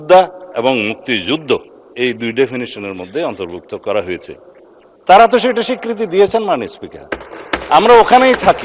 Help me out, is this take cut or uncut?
uncut